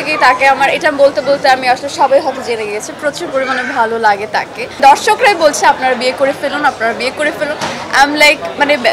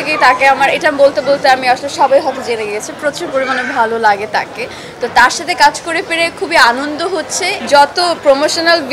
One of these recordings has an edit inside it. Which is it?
first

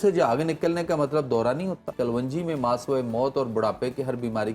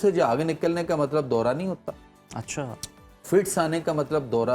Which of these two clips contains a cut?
first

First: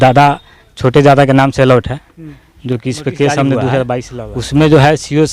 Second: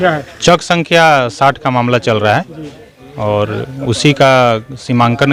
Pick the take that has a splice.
first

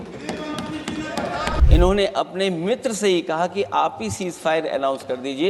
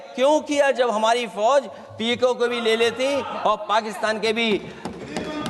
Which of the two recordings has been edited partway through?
first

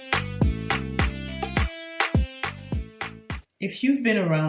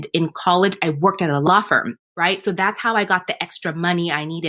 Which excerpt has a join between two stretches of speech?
second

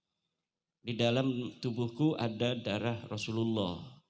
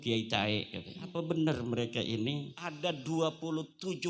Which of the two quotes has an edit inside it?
second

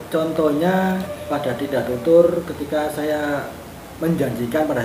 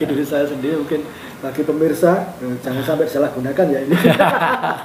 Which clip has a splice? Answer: first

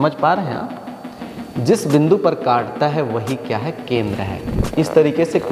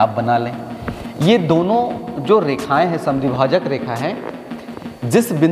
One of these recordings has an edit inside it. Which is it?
first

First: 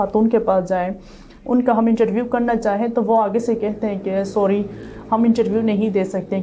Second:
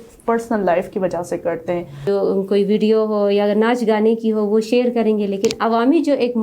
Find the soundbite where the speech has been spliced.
second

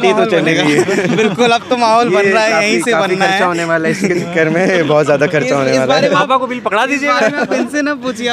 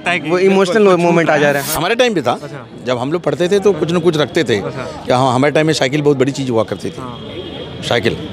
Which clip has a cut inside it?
second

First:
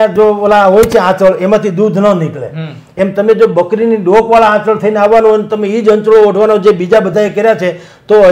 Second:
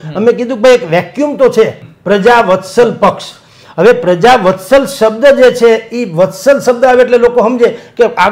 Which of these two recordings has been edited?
second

